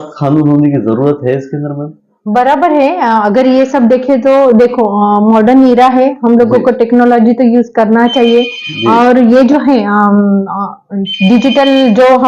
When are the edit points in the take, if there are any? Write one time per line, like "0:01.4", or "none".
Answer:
none